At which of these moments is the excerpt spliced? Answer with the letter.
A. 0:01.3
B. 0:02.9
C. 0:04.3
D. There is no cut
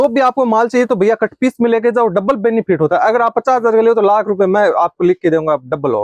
D